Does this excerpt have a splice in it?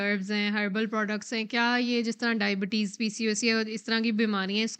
no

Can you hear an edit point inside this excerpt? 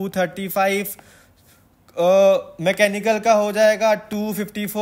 no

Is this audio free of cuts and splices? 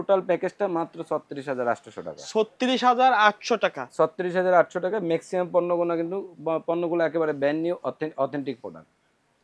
yes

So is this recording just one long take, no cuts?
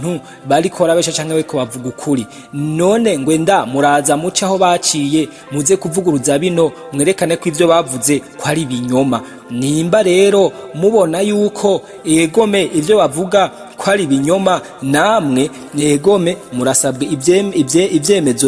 yes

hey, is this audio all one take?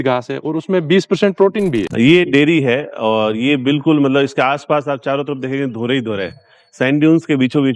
no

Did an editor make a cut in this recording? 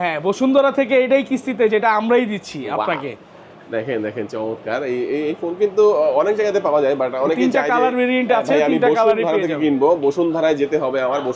no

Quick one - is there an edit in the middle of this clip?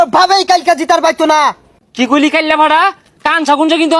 yes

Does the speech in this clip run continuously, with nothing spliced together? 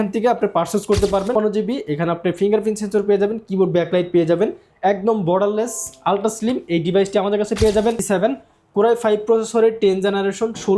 no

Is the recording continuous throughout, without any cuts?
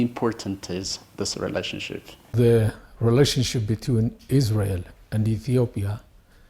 no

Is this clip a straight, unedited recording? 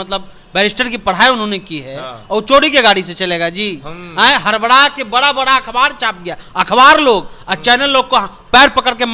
yes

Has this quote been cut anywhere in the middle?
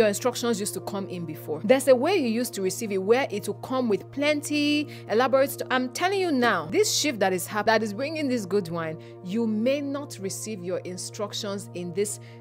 yes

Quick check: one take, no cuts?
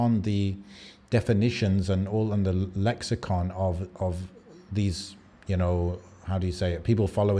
yes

